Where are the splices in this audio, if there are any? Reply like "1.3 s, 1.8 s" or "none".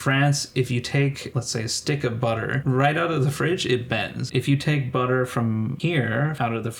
1.3 s, 2.6 s, 4.2 s, 6.0 s